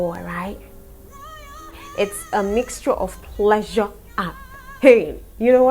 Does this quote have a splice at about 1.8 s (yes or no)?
yes